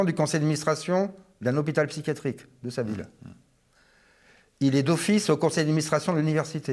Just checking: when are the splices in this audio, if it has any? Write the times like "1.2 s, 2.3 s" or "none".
none